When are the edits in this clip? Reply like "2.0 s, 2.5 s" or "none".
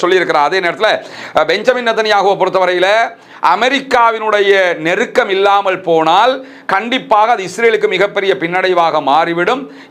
1.1 s